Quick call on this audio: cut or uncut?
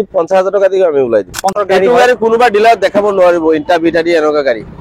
cut